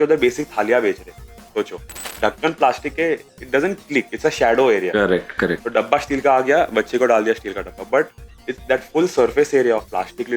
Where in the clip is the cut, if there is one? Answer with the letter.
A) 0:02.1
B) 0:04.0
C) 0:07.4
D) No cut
A